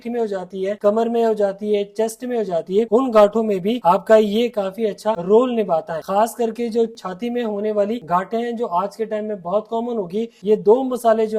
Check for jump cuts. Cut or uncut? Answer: cut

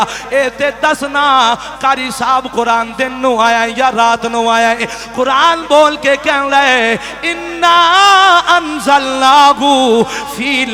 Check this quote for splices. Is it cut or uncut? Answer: uncut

